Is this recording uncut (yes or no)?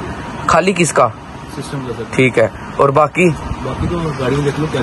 yes